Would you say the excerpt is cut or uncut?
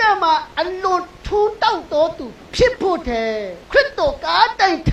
cut